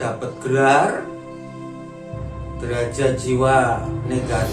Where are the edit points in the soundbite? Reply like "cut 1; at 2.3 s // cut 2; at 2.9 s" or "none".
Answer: cut 1; at 1.0 s // cut 2; at 2.6 s